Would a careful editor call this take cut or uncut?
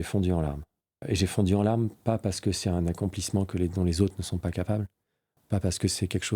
cut